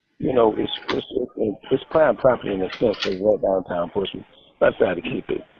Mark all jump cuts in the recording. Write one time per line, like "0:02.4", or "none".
0:04.0